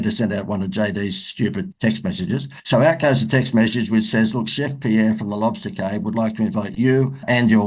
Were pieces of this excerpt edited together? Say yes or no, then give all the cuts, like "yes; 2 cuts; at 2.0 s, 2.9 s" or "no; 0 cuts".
no; 0 cuts